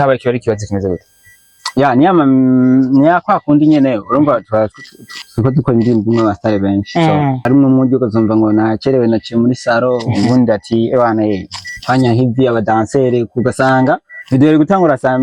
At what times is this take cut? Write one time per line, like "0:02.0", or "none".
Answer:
0:07.4